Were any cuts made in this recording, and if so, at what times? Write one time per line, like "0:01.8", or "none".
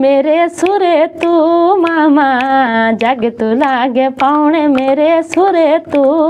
none